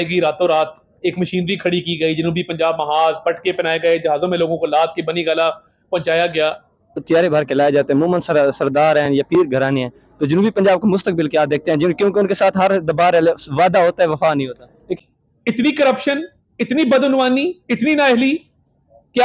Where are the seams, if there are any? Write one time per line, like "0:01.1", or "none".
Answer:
0:07.0
0:15.0